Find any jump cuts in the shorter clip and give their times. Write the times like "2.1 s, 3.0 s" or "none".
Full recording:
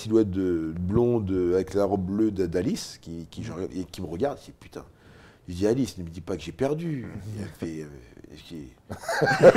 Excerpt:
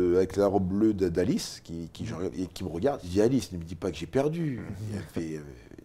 3.0 s